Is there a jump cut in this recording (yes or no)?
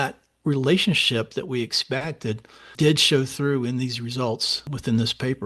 no